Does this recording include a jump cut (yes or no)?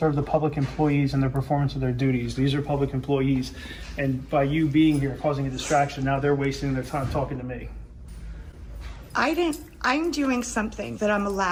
no